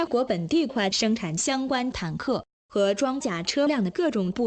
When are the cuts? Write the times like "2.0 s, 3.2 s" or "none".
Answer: none

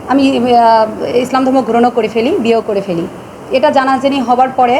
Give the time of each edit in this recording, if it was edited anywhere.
none

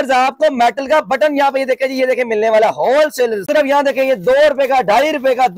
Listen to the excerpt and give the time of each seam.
3.5 s

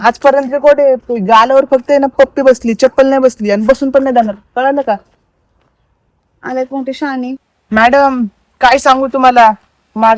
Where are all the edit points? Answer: 7.5 s

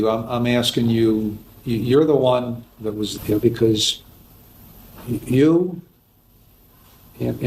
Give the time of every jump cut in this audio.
3.1 s

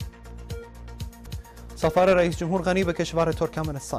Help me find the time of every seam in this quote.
1.1 s

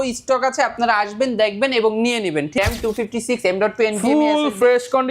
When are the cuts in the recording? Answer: 2.6 s

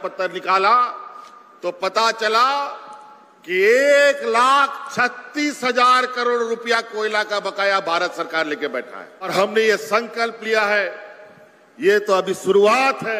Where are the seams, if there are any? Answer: 9.3 s

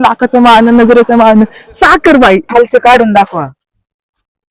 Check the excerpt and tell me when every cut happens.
2.4 s

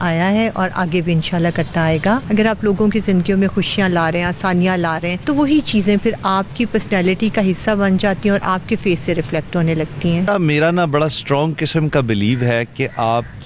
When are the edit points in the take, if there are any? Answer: 2.2 s, 5.1 s, 10.3 s

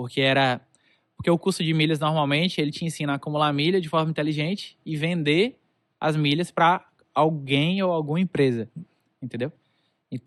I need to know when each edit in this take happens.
none

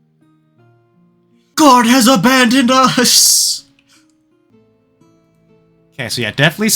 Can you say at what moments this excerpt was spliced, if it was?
1.5 s, 4.5 s

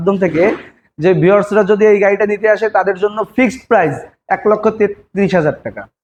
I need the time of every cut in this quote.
none

